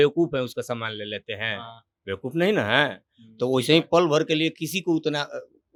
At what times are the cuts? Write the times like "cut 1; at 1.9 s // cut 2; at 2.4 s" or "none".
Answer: none